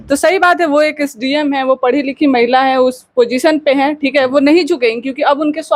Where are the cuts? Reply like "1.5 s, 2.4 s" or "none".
none